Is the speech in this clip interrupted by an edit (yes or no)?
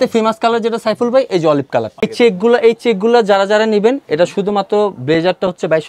no